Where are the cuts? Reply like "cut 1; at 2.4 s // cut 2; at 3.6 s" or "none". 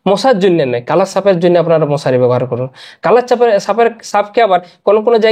none